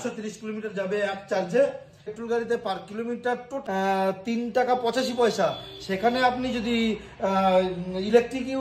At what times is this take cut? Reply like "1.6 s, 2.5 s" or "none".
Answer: 2.1 s, 3.5 s